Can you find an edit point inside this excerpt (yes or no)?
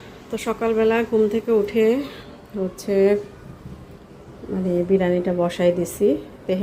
no